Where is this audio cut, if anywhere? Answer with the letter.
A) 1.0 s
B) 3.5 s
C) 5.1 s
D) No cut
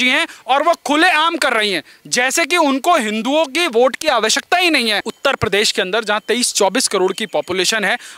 C